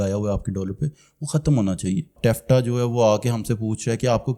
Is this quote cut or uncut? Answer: cut